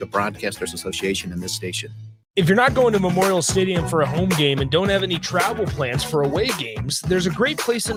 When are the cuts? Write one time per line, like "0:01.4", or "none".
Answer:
none

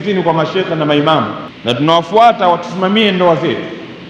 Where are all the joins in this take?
0:01.5

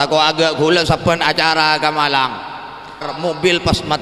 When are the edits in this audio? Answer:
0:03.1

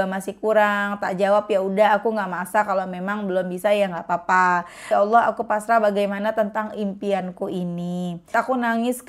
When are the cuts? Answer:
0:04.8
0:08.3

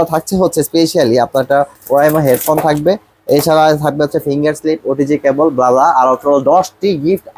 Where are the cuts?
none

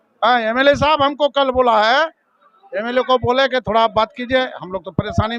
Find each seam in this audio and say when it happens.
none

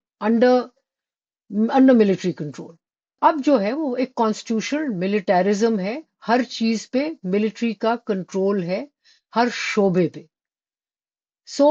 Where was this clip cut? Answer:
0:03.2

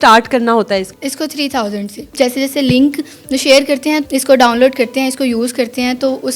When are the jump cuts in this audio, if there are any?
0:00.9
0:02.1
0:04.0

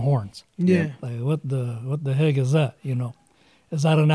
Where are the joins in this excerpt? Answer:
none

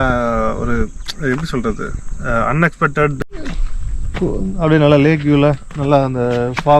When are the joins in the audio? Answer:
0:03.2

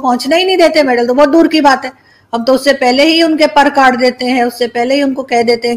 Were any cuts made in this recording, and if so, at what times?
none

